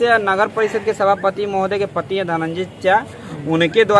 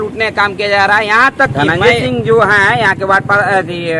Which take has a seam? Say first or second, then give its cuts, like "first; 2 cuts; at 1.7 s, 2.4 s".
second; 1 cut; at 1.5 s